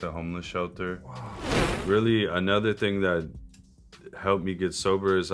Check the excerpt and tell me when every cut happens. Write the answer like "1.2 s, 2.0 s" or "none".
1.6 s

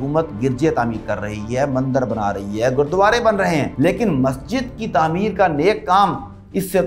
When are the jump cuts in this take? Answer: 3.7 s

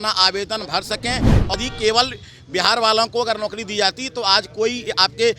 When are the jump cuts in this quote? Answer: 1.5 s

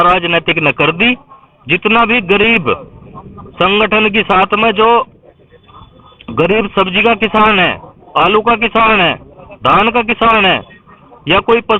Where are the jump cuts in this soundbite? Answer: none

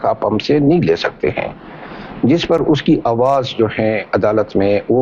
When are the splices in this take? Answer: none

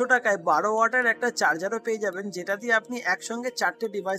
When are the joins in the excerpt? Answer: none

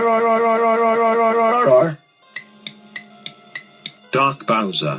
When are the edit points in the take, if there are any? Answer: 1.5 s, 2.2 s

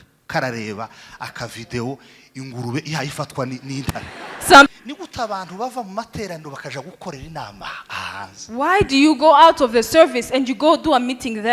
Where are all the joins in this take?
4.7 s

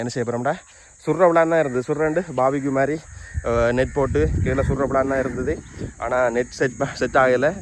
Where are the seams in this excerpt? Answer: none

